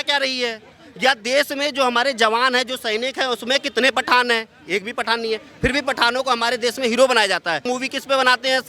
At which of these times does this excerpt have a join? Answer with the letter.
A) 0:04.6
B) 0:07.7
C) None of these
B